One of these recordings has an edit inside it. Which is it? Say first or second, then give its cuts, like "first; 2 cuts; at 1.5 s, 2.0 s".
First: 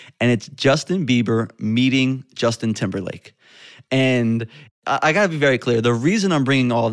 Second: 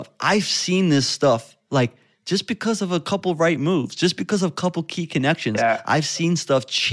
first; 1 cut; at 4.7 s